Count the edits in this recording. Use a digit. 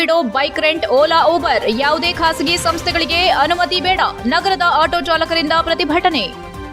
0